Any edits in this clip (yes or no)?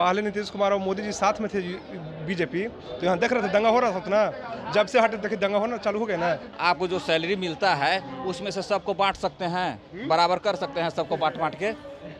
yes